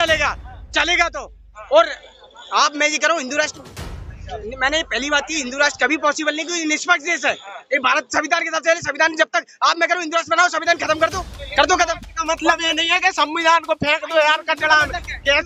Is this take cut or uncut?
uncut